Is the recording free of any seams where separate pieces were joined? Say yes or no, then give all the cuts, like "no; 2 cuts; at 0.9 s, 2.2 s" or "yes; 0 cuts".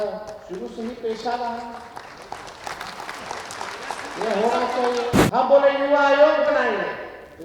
no; 1 cut; at 5.2 s